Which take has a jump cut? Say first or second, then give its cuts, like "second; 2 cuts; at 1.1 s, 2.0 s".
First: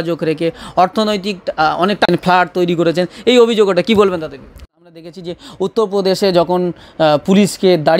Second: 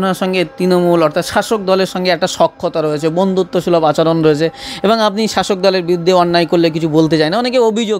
first; 1 cut; at 5.0 s